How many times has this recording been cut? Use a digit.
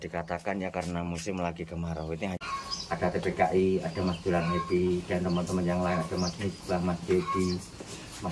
1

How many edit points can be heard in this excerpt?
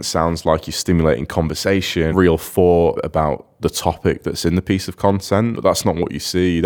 3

